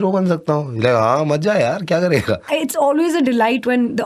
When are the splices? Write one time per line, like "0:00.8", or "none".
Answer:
0:02.4